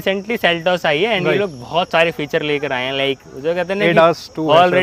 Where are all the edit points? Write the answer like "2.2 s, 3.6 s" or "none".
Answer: none